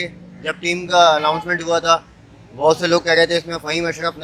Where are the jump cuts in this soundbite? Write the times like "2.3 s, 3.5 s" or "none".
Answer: none